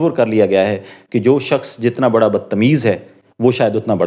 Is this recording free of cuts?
yes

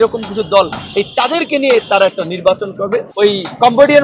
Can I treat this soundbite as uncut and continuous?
no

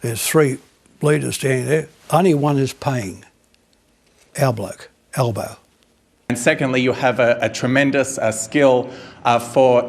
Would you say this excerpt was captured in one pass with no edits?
no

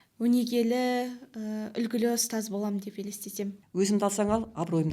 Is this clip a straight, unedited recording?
no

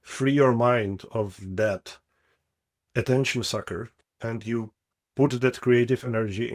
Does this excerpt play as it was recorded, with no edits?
yes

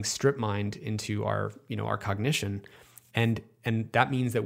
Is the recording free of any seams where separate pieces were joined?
yes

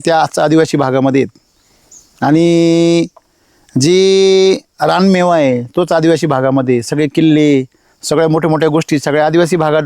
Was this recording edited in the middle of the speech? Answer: no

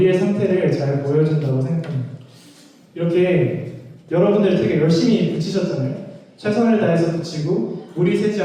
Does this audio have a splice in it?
no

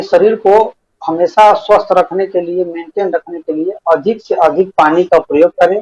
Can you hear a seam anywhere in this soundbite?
no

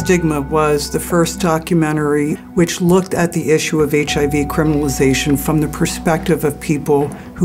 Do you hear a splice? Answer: yes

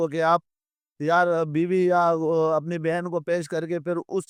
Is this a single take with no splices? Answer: yes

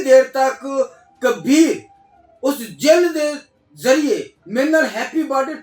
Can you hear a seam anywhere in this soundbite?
no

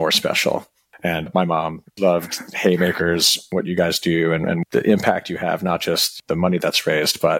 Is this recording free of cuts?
no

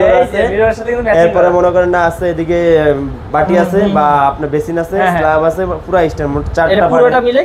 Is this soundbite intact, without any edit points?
yes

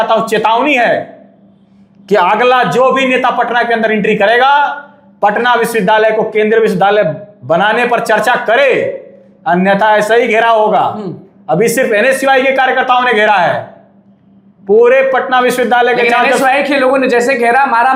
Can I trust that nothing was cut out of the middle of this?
yes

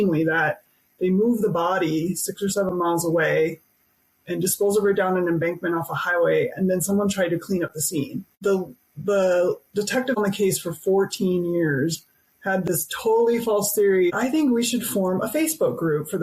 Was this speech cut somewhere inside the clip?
yes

